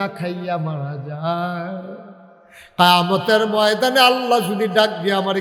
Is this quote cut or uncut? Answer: uncut